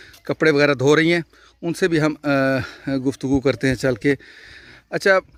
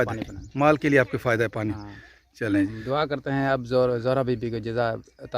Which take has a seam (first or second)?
second